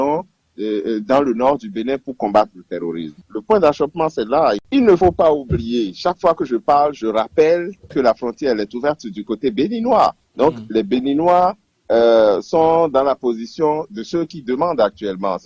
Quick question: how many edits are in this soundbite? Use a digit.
1